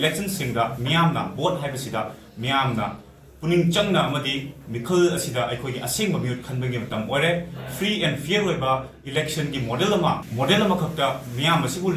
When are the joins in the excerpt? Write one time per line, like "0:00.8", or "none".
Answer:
0:10.3